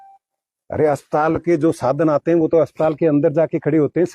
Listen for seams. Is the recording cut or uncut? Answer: uncut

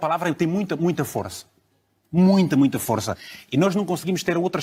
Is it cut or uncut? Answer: uncut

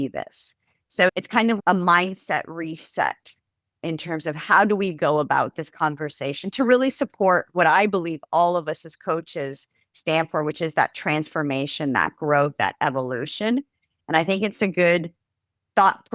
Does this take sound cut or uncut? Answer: cut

